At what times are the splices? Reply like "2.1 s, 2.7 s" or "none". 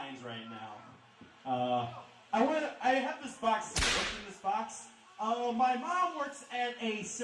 2.6 s